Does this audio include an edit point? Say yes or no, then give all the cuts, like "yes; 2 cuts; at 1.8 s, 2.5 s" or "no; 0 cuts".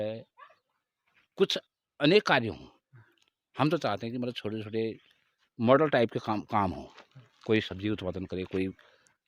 no; 0 cuts